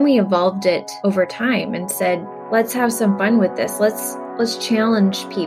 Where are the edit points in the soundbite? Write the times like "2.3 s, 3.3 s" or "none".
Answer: none